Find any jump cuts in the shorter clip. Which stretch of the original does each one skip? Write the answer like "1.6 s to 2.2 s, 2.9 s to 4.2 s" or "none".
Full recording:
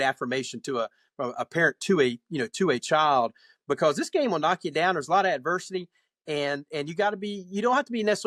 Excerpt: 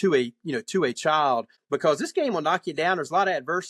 3.4 s to 3.5 s